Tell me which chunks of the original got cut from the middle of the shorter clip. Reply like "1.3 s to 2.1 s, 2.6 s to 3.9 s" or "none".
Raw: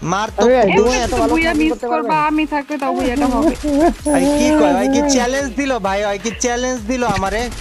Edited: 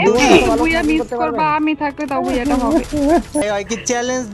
4.1 s to 6.0 s